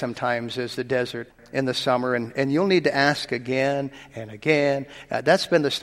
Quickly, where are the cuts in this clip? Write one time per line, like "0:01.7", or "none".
0:01.4